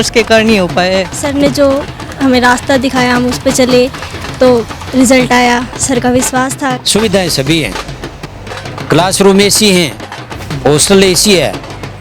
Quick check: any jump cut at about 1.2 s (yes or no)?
yes